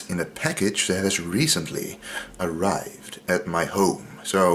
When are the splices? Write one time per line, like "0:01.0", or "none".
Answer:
0:03.0